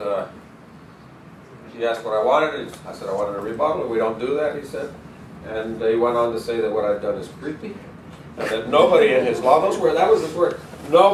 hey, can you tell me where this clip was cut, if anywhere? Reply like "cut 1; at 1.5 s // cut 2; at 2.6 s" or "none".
none